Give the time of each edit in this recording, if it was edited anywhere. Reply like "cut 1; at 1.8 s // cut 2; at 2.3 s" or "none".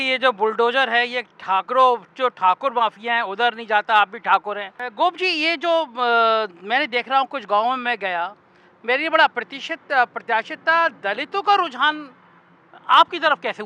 cut 1; at 4.8 s